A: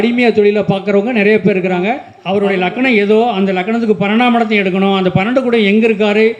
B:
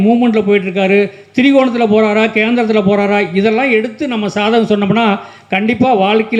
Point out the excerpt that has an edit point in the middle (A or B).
A